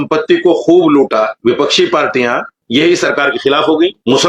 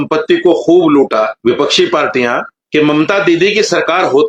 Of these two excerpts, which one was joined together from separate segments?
second; 1 cut; at 2.6 s

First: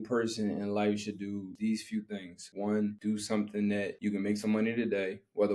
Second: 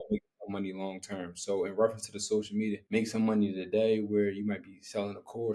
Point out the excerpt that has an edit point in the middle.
first; 4 cuts; at 1.5 s, 2.4 s, 3.0 s, 3.9 s

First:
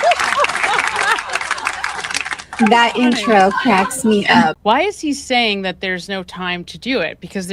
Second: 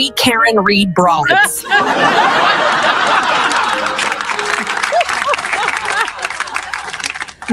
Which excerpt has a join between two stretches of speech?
first; 1 cut; at 4.5 s

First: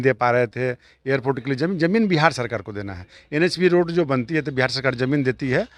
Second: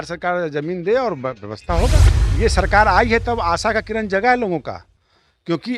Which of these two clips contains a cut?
second; 1 cut; at 2.1 s

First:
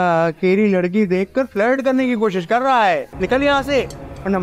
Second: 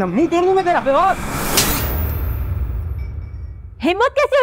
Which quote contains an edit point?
first; 1 cut; at 3.1 s

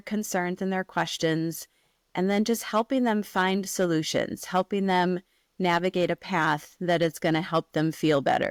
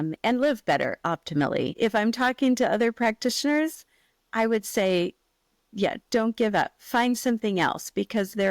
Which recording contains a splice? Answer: second; 1 cut; at 1.7 s

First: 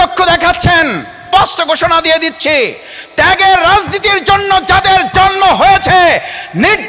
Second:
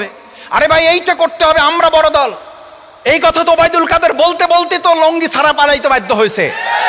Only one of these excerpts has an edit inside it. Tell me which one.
first; 1 cut; at 1.2 s

